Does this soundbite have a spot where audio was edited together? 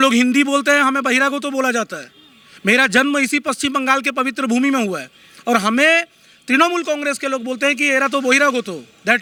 no; 0 cuts

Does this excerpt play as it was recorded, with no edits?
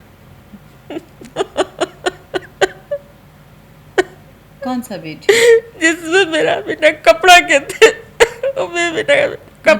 yes; 0 cuts

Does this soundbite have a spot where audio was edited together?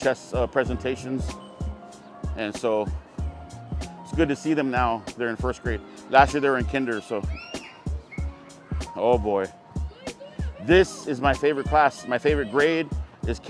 no; 0 cuts

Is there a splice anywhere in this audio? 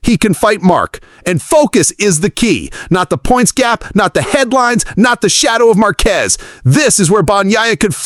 no; 0 cuts

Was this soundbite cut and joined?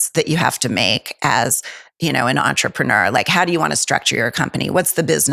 no; 0 cuts

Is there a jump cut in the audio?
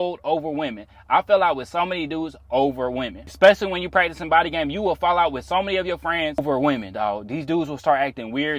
yes; 2 cuts; at 3.2 s, 6.4 s

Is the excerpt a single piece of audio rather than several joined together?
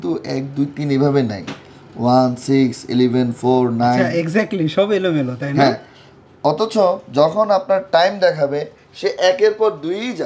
yes; 0 cuts

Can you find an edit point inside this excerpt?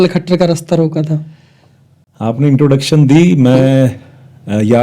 no; 0 cuts

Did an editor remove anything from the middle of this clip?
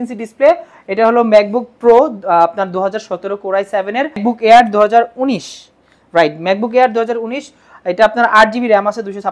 yes; 1 cut; at 4.2 s

